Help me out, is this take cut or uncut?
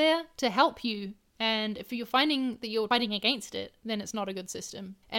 cut